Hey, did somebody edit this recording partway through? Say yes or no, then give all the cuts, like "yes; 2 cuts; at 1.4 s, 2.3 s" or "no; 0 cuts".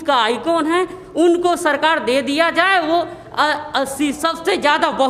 no; 0 cuts